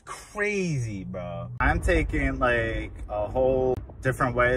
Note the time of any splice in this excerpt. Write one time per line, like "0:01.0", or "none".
0:01.6
0:03.7